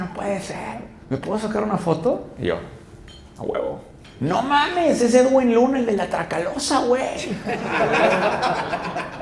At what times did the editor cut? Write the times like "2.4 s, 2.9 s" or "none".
0.9 s, 4.0 s